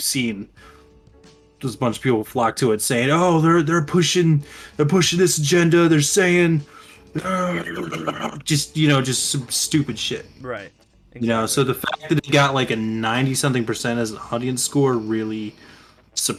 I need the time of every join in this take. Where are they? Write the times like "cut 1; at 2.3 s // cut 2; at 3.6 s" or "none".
none

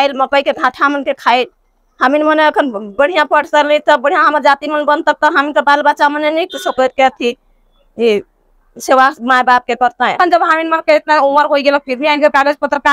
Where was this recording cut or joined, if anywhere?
cut 1; at 10.1 s

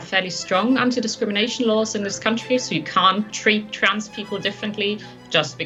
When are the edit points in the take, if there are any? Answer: none

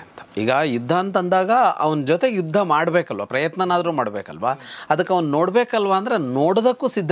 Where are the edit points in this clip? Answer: none

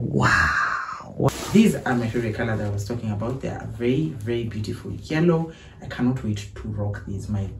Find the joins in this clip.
cut 1; at 1.3 s

